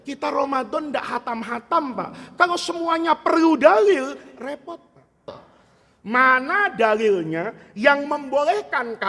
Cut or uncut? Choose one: cut